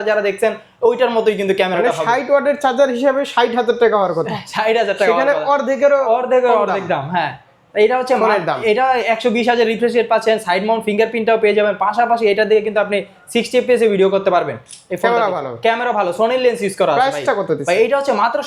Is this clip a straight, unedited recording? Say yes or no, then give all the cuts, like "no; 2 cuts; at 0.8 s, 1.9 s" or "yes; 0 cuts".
yes; 0 cuts